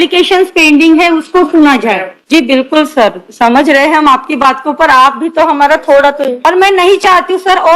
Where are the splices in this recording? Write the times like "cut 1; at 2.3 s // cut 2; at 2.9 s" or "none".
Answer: cut 1; at 2.1 s // cut 2; at 6.4 s